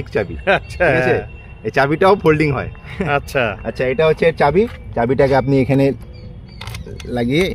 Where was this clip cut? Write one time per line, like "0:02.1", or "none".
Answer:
none